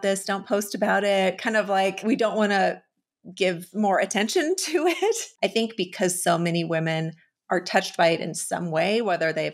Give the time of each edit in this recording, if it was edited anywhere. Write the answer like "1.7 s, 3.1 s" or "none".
2.0 s, 5.3 s